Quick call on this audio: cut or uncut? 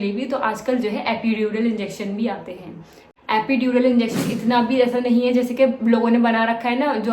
cut